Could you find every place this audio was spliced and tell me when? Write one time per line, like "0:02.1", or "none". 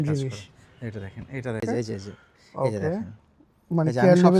0:01.6